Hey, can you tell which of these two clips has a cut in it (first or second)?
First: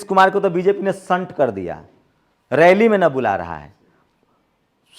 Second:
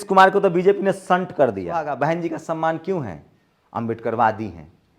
second